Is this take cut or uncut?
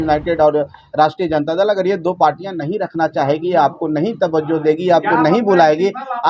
uncut